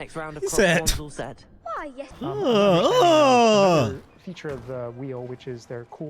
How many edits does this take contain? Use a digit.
1